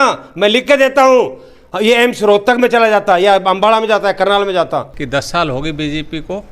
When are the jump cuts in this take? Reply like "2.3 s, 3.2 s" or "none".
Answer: 5.0 s